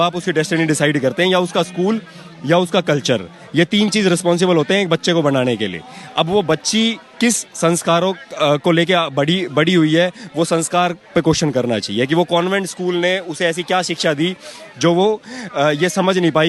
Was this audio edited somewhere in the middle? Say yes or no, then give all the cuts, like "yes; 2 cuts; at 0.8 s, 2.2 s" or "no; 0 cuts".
no; 0 cuts